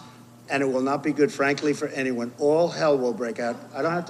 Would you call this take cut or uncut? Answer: uncut